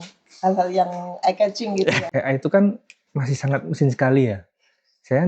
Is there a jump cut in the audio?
yes; 1 cut; at 2.1 s

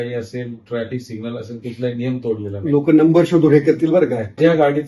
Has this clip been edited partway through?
no; 0 cuts

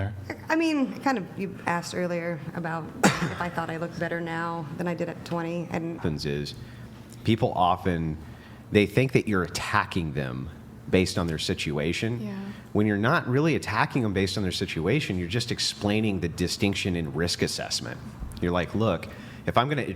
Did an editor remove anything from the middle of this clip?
yes; 1 cut; at 6.0 s

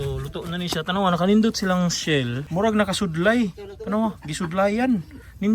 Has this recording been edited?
yes; 1 cut; at 2.4 s

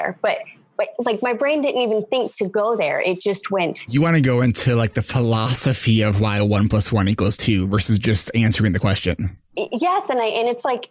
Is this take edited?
yes; 1 cut; at 9.4 s

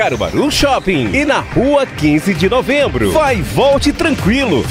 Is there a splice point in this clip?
yes; 1 cut; at 3.1 s

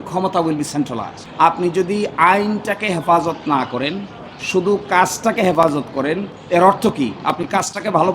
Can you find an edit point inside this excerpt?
yes; 1 cut; at 1.1 s

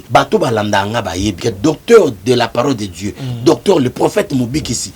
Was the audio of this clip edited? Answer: yes; 1 cut; at 1.4 s

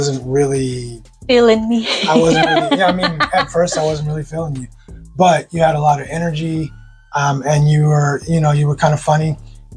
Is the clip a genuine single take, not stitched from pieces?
yes; 0 cuts

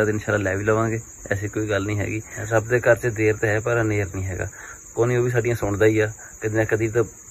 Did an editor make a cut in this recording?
no; 0 cuts

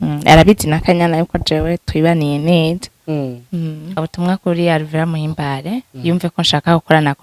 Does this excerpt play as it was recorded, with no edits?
no; 1 cut; at 4.0 s

